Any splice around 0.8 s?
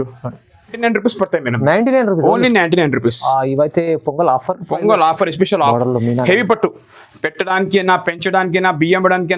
yes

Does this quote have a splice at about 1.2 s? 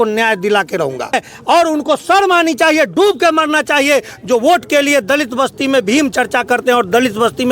yes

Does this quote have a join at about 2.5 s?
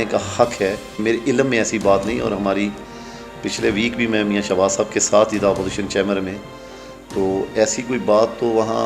no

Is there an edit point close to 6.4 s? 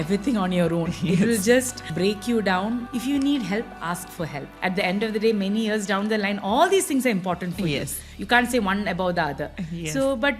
no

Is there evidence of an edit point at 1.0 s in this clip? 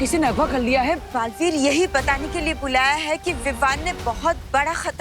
yes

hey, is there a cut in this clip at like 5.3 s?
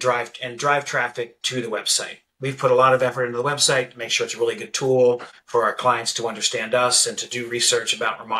yes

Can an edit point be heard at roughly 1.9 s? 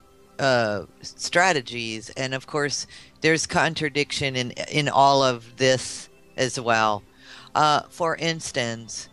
yes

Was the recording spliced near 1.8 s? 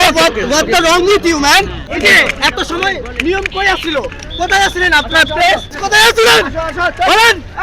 yes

